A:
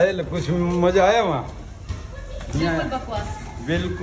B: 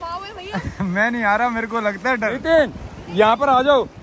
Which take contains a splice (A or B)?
B